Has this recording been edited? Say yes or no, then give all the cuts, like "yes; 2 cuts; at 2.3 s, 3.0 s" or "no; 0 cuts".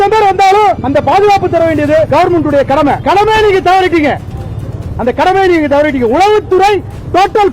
no; 0 cuts